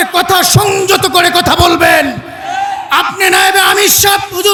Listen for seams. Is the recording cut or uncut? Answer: uncut